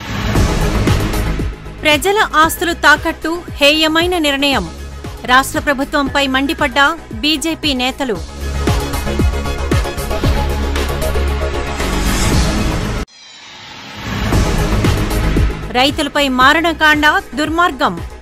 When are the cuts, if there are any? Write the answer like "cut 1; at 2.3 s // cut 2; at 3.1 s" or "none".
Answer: cut 1; at 1.2 s